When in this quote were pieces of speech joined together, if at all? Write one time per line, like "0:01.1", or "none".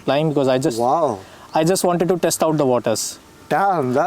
none